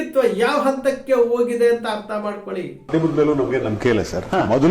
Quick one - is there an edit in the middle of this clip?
yes; 1 cut; at 2.9 s

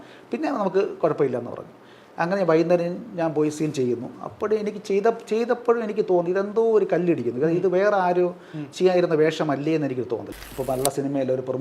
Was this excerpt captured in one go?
no; 1 cut; at 10.3 s

